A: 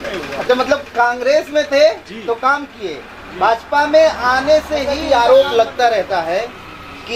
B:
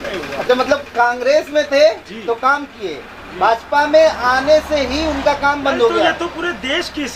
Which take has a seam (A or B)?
A